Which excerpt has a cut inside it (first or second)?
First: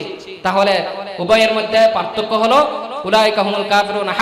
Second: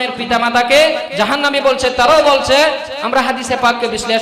second